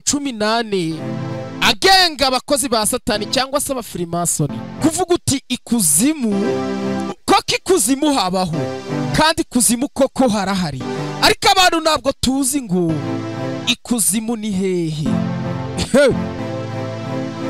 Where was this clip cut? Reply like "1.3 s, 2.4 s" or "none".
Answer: 4.7 s, 16.4 s